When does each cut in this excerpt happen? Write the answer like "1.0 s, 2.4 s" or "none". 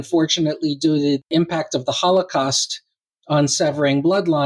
1.3 s